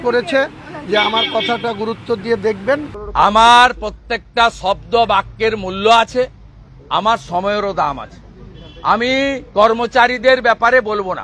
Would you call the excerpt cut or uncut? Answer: cut